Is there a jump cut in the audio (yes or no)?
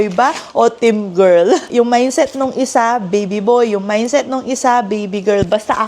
yes